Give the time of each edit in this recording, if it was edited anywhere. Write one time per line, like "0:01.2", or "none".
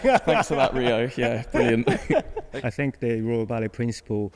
0:02.5